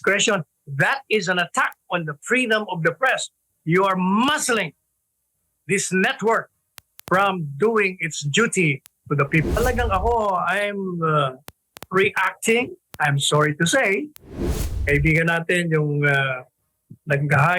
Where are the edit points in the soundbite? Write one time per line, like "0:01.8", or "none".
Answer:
0:09.6